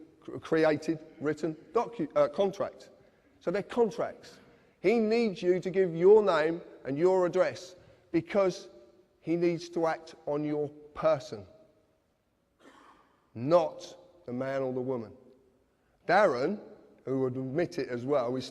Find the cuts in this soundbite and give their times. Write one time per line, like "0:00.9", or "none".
0:08.1